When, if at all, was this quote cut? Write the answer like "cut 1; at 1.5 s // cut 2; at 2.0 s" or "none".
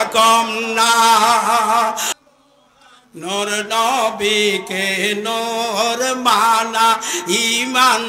cut 1; at 2.1 s